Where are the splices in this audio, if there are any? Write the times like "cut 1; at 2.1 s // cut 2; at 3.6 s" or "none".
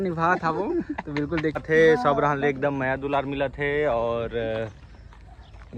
cut 1; at 1.6 s